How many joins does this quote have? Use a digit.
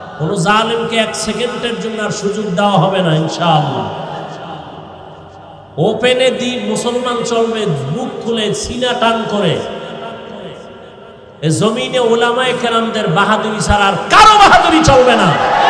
1